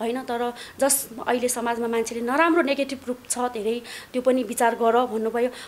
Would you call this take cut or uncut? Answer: uncut